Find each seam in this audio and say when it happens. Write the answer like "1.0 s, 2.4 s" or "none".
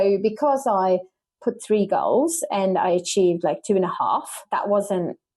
4.4 s